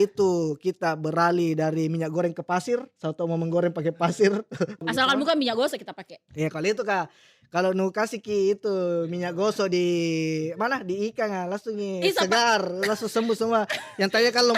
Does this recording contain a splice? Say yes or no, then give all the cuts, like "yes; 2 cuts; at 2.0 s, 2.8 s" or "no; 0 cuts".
yes; 1 cut; at 4.8 s